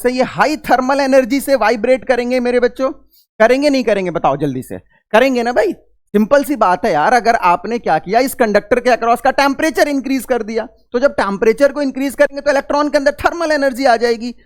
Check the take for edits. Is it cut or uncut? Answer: uncut